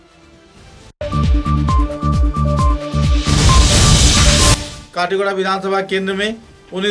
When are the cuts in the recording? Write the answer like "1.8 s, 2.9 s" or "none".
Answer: none